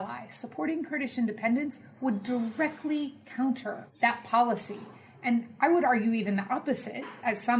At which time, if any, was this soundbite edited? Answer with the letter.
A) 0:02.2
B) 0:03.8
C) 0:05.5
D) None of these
B